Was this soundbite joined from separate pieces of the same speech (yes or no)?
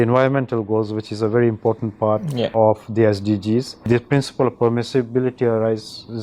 yes